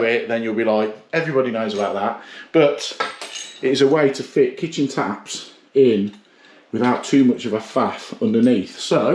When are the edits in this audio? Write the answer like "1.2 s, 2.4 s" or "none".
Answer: none